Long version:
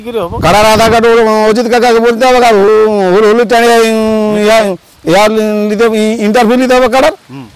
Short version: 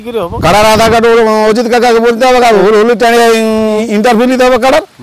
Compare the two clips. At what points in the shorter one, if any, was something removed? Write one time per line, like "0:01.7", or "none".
0:02.6
0:03.8